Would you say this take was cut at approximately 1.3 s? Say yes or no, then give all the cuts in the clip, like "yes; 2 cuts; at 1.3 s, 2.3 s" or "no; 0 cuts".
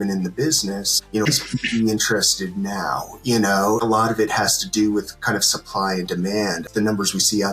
yes; 3 cuts; at 1.3 s, 3.8 s, 6.6 s